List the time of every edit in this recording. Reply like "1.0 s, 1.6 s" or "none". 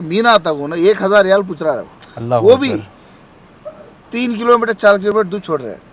none